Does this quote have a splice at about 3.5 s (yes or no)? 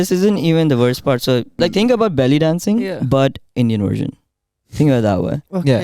no